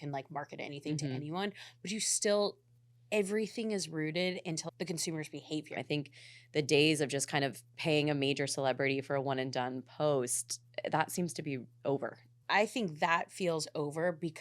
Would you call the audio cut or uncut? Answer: cut